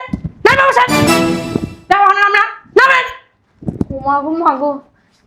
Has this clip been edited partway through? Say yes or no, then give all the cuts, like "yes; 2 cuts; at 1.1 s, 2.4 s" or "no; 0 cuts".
no; 0 cuts